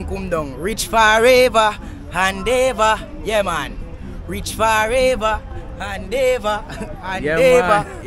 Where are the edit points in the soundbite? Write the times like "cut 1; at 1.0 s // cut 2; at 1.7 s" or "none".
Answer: none